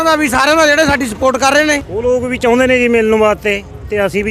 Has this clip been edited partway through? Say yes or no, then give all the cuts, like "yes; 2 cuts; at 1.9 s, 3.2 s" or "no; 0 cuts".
yes; 1 cut; at 1.9 s